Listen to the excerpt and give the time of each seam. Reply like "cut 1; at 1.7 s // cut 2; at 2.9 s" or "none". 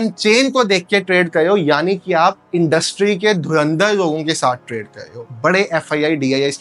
none